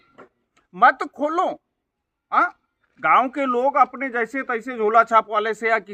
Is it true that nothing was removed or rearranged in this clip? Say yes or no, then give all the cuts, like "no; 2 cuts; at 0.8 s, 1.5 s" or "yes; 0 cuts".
yes; 0 cuts